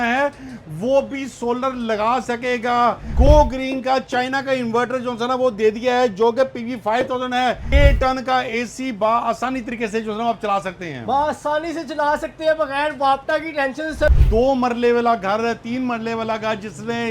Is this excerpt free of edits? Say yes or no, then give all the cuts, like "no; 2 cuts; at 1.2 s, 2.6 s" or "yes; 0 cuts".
no; 3 cuts; at 3.1 s, 7.7 s, 14.2 s